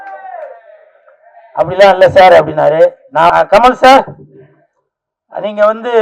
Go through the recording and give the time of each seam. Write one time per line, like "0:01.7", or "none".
0:03.3